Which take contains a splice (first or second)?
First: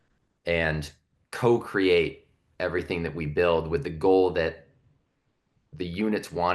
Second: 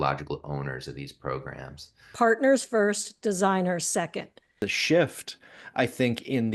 second